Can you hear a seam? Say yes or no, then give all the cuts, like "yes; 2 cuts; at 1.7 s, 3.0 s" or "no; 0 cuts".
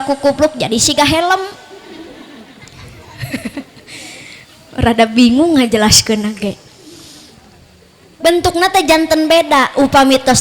no; 0 cuts